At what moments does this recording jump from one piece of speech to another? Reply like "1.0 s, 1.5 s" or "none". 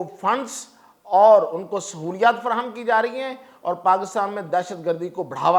none